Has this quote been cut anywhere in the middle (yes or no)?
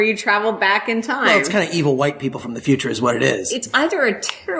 yes